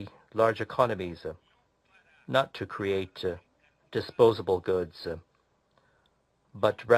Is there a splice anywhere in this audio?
yes; 1 cut; at 4.4 s

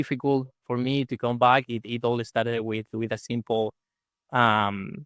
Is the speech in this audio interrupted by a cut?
no; 0 cuts

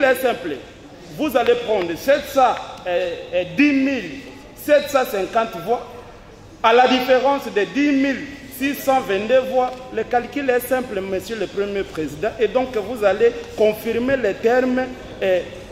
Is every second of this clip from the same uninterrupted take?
yes; 0 cuts

